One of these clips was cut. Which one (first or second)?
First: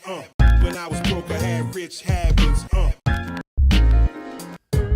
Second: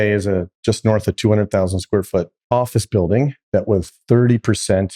second